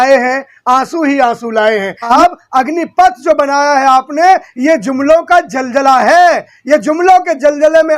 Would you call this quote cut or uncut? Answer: cut